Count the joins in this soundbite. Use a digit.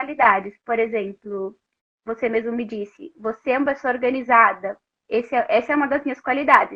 0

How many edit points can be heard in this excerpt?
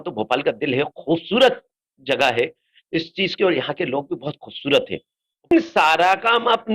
1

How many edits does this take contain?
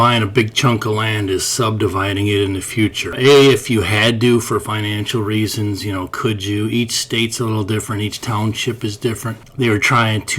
2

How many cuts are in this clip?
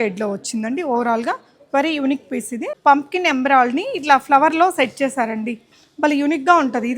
1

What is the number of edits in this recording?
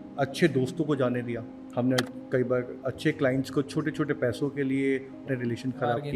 2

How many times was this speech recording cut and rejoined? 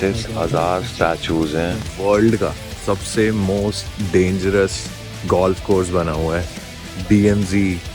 1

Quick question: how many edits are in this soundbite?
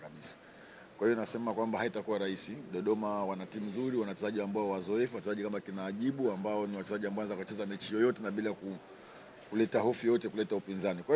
0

